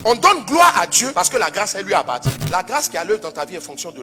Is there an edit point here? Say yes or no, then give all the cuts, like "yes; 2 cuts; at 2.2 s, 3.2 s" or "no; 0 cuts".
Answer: yes; 1 cut; at 2.3 s